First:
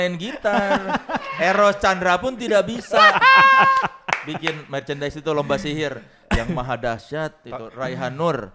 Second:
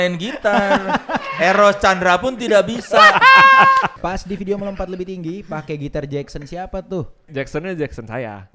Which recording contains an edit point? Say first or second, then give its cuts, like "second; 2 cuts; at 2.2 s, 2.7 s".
second; 2 cuts; at 4.0 s, 7.3 s